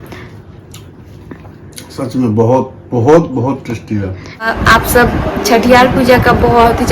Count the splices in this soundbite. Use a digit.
1